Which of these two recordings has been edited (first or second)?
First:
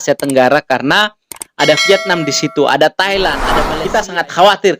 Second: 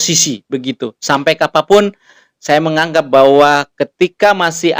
first